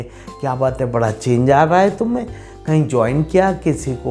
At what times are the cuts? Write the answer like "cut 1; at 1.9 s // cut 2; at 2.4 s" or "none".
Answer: none